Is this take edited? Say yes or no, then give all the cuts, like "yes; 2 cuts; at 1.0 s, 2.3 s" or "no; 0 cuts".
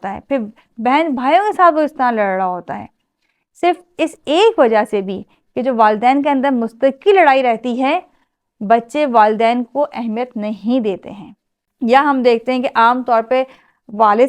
yes; 1 cut; at 11.6 s